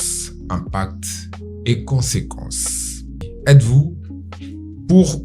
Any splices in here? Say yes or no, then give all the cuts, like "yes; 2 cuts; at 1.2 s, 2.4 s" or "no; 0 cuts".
yes; 1 cut; at 3.3 s